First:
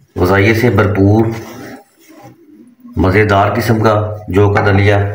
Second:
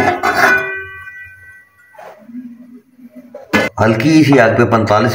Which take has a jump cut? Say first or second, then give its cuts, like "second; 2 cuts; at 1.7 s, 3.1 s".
second; 1 cut; at 3.7 s